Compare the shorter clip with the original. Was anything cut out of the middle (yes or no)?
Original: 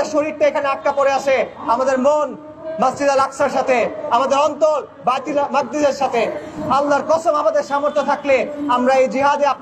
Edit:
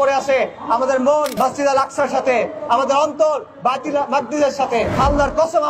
yes